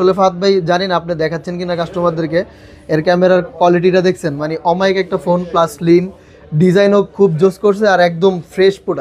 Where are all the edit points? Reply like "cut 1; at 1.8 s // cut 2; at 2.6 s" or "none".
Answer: none